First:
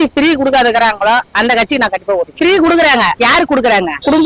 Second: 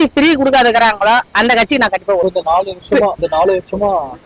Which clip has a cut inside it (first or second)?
first